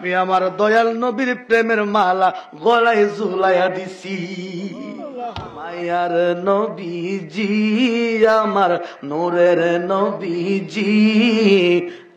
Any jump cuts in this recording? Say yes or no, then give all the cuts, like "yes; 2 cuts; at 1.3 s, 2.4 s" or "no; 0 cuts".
yes; 1 cut; at 5.8 s